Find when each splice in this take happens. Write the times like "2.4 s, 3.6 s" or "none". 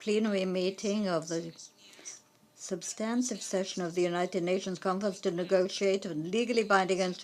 5.5 s